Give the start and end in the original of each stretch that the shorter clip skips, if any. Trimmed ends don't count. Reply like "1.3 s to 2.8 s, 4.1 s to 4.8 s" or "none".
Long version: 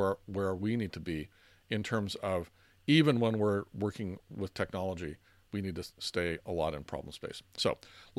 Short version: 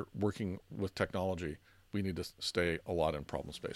none